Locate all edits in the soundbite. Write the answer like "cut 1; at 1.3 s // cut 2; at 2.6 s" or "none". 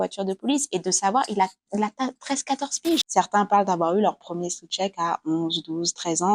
cut 1; at 3.1 s

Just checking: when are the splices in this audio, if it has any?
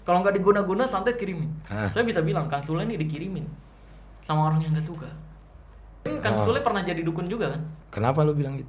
cut 1; at 6.1 s // cut 2; at 7.7 s

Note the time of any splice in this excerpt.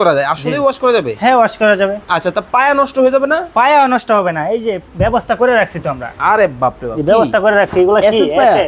none

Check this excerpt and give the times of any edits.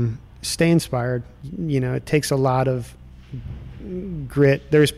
cut 1; at 1.4 s

